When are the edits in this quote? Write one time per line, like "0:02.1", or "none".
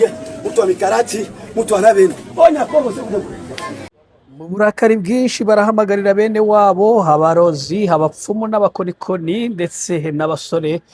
0:04.0